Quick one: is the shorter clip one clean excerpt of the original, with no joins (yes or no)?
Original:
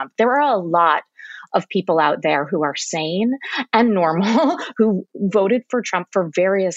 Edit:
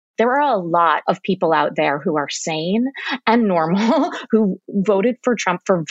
no